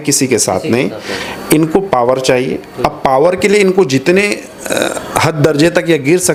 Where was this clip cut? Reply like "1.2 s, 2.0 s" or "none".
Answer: none